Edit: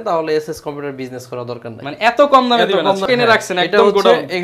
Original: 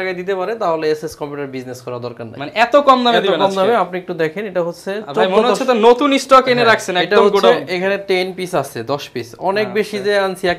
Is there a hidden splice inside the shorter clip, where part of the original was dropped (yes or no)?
yes